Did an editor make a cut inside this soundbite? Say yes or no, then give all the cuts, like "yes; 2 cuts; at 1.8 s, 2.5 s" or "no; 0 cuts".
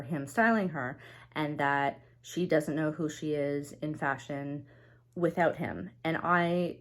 no; 0 cuts